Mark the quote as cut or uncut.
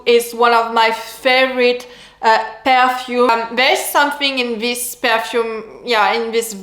cut